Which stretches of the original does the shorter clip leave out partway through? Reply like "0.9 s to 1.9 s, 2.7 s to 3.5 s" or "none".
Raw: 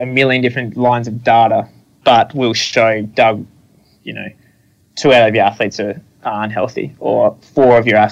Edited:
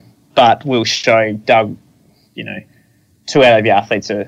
none

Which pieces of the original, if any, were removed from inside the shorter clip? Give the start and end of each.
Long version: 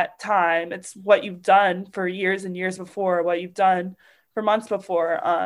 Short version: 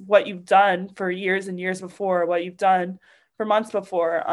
none

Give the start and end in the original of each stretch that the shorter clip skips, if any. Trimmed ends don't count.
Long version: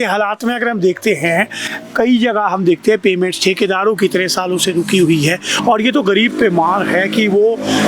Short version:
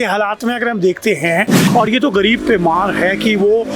1.6 s to 5.5 s

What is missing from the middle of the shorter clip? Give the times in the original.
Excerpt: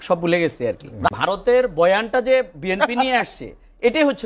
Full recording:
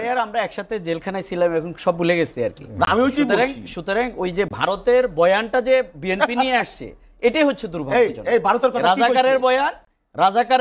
2.9 s to 4.5 s

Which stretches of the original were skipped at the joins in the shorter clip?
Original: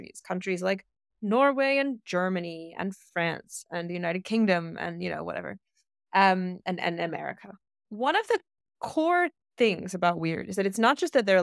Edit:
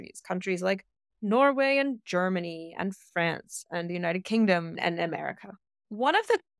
4.8 s to 6.8 s

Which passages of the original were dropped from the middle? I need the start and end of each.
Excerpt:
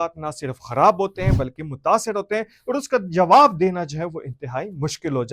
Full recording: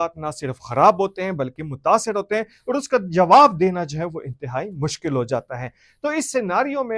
none

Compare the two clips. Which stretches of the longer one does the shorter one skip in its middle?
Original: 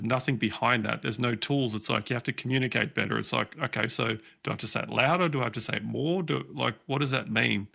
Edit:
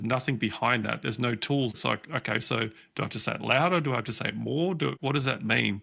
1.8 s to 3.3 s, 6.5 s to 6.8 s

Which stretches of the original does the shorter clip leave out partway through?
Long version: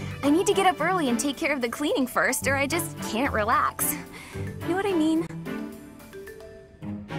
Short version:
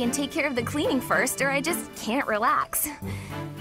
none

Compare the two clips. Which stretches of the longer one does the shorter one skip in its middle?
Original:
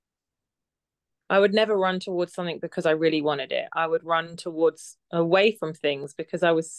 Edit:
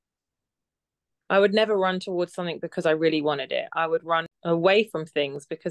4.3 s to 5.0 s

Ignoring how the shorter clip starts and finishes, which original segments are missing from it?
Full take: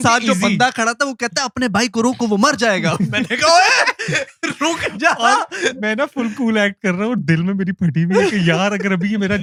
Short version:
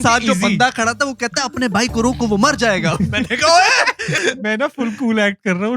4.1 s to 5.5 s

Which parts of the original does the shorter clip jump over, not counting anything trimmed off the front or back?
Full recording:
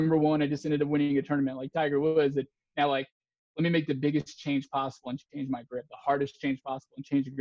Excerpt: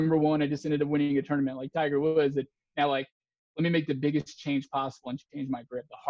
none

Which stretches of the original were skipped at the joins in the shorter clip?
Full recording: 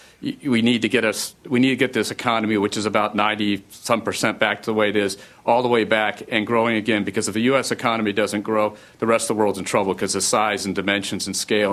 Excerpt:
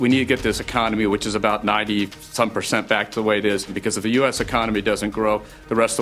5.3 s to 7.1 s

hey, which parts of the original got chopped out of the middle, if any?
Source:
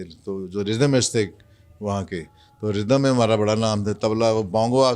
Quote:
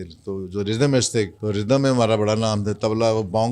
1.3 s to 2.5 s

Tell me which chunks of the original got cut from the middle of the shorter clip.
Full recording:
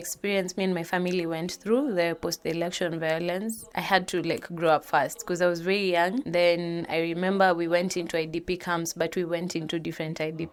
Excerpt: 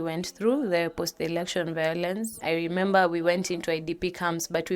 3.6 s to 6.8 s

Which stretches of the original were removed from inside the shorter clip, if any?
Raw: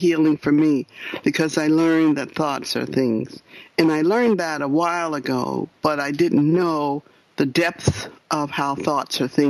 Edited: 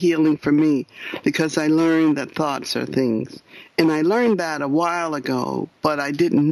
none

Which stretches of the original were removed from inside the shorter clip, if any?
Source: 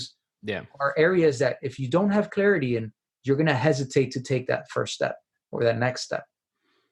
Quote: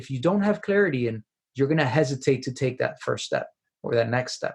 none

